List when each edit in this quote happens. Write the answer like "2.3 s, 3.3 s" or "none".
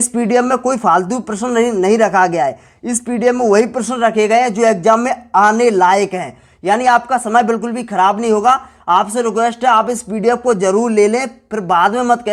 none